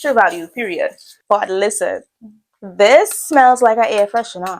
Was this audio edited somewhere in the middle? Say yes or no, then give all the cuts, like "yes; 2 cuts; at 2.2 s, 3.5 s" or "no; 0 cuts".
yes; 1 cut; at 1.1 s